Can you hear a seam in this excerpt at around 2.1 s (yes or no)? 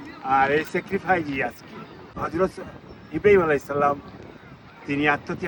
no